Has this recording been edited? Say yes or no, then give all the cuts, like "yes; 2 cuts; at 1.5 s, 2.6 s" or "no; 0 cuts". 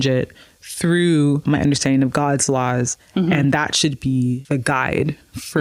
yes; 2 cuts; at 1.4 s, 4.4 s